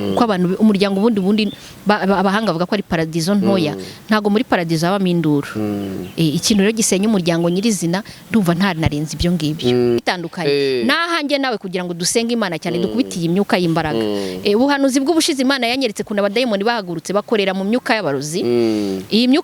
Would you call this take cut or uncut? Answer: cut